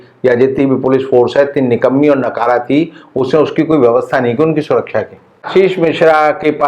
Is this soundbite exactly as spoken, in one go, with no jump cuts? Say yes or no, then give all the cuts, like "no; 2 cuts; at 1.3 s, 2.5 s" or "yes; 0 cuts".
no; 1 cut; at 5.4 s